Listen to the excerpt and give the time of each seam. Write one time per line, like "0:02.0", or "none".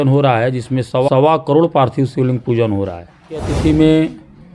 0:01.1
0:03.5